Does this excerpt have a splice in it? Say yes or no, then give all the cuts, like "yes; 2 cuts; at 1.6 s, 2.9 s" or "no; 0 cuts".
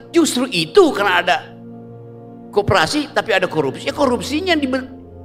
no; 0 cuts